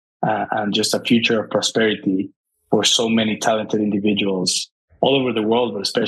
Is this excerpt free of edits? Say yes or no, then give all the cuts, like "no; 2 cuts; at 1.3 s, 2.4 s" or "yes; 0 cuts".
yes; 0 cuts